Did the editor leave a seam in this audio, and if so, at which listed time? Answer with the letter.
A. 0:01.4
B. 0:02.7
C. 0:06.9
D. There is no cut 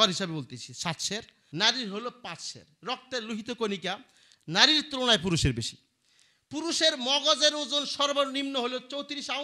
A